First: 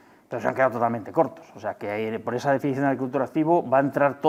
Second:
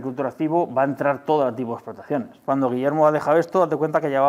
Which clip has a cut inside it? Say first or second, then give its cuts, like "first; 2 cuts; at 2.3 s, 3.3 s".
second; 1 cut; at 2.4 s